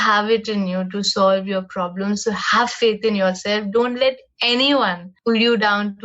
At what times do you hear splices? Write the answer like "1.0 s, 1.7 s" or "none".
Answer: 5.1 s